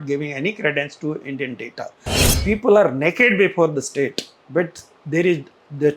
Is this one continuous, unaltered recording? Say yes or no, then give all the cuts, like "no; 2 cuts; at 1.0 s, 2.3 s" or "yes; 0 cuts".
no; 1 cut; at 2.3 s